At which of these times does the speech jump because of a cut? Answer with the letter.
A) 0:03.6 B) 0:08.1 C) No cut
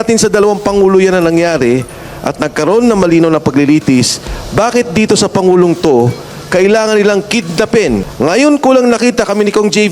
B